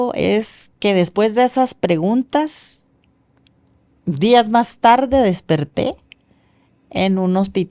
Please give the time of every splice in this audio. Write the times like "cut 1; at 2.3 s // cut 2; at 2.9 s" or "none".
none